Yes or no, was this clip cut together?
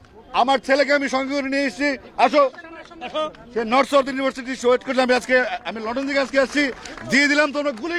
no